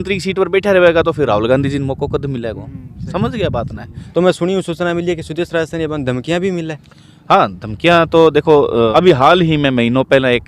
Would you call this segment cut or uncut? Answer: cut